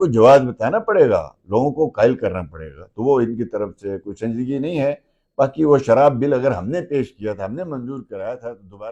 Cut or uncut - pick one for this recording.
uncut